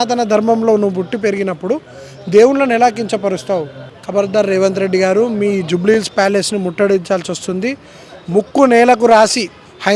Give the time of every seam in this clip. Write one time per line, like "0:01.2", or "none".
none